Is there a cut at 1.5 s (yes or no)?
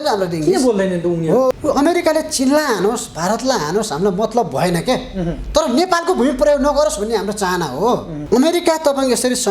yes